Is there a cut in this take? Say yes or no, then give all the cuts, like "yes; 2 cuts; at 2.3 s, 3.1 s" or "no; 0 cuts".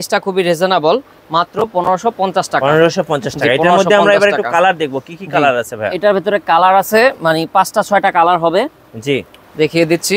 no; 0 cuts